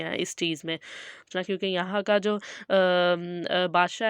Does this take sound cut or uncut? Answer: cut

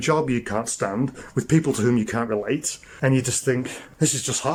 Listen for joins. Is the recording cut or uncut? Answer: uncut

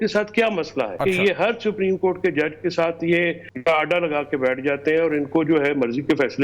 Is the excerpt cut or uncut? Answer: cut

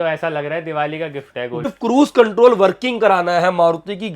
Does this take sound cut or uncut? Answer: cut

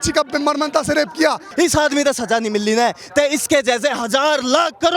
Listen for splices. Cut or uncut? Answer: cut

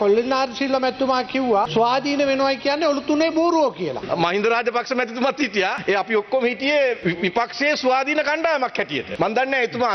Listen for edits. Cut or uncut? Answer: cut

